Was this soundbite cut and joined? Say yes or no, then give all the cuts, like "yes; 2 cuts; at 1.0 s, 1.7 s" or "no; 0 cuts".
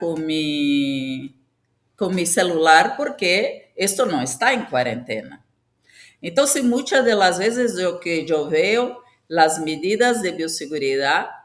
no; 0 cuts